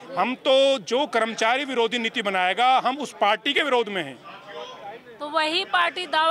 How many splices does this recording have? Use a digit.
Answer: 0